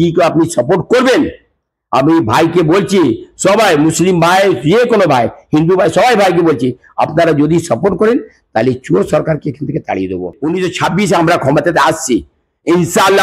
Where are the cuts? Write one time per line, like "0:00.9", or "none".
0:10.4

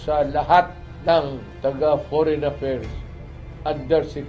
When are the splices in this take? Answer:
0:01.4

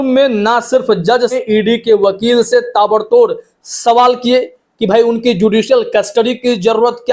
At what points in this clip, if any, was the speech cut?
0:01.4

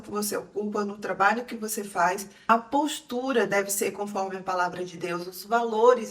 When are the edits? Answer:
0:02.3

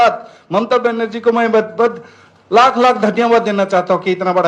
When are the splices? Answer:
none

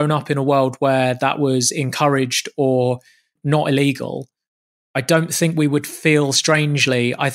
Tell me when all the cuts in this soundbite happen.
0:03.3

